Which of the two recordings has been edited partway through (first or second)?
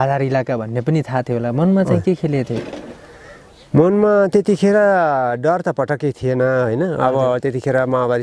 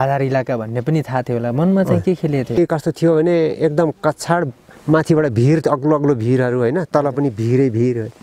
second